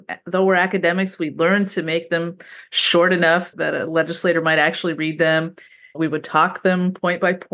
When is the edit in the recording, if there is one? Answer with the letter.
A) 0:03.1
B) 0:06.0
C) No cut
B